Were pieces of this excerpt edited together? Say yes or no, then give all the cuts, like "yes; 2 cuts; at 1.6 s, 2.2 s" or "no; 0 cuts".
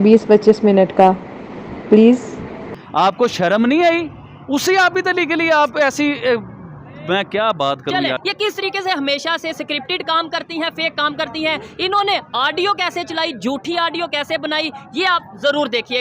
yes; 1 cut; at 8.2 s